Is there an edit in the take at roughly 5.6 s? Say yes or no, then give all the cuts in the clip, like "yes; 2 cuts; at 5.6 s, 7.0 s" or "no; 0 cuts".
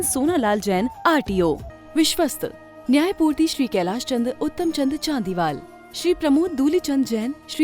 no; 1 cut; at 1.7 s